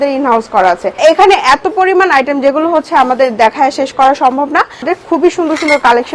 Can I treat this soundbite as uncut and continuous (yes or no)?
no